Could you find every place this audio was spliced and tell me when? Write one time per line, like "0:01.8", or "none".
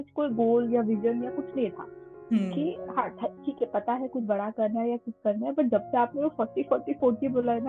none